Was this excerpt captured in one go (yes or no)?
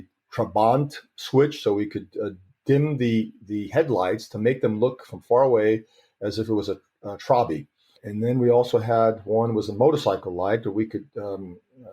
no